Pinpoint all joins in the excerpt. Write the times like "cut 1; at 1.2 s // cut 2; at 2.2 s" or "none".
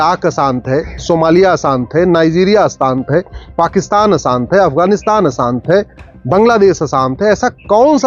none